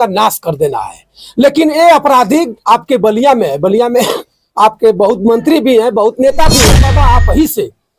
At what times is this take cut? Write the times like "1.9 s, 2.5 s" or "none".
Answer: 6.8 s